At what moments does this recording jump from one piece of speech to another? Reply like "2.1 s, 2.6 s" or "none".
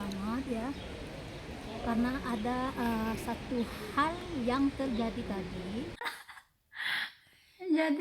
6.4 s